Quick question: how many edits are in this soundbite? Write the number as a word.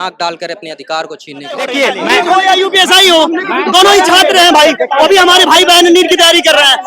one